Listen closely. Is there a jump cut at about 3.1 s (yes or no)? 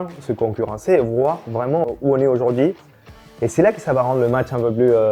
no